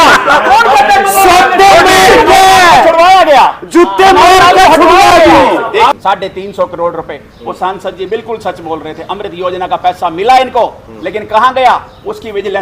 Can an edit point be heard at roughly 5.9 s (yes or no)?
yes